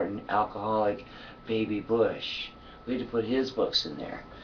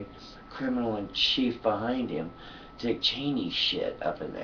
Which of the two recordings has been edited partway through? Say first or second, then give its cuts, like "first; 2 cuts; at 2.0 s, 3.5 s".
second; 1 cut; at 2.5 s